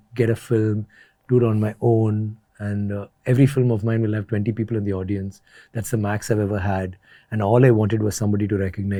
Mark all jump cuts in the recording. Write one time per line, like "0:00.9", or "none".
none